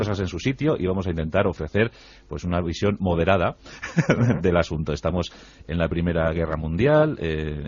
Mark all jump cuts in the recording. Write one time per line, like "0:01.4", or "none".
0:06.1